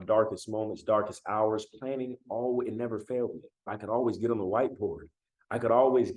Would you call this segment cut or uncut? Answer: cut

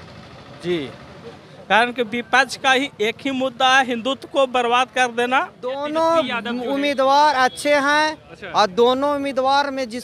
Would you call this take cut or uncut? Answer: cut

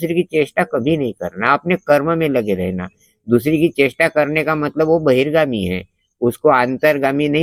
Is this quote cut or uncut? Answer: uncut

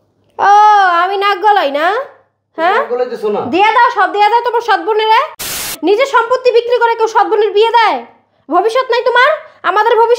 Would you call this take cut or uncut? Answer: cut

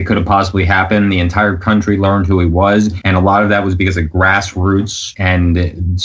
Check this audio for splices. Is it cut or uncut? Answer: cut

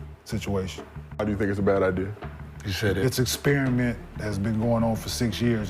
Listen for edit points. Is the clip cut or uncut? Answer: cut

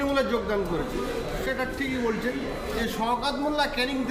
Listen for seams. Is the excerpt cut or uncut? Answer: cut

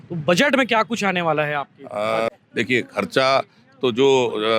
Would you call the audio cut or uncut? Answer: cut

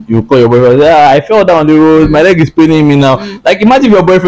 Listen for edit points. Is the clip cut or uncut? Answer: uncut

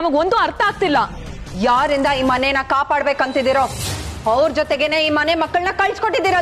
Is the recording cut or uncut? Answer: uncut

